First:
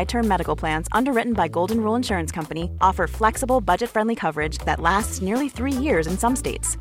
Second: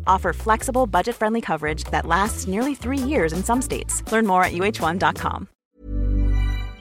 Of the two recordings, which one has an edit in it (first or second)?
second